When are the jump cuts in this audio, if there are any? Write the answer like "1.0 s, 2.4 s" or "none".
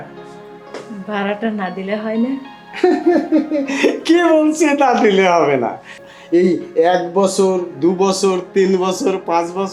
6.0 s